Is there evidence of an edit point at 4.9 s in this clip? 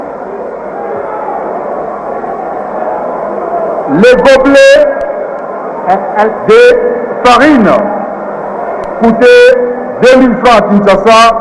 no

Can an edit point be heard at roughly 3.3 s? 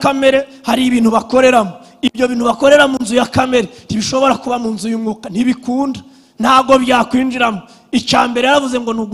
no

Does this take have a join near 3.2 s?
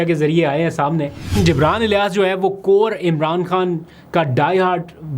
no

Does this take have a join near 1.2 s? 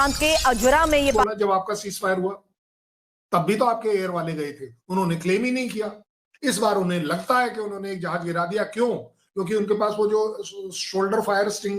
yes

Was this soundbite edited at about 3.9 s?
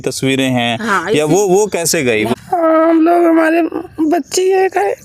no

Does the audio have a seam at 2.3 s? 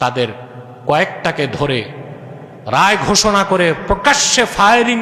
no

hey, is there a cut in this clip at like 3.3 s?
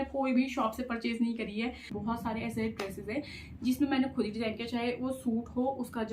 no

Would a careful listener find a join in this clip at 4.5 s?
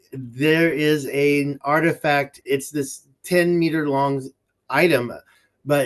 no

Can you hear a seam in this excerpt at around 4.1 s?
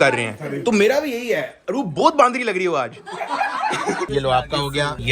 yes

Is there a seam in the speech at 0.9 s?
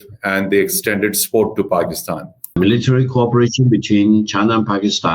no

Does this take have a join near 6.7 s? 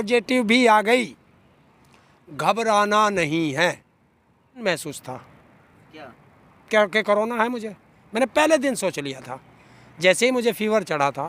no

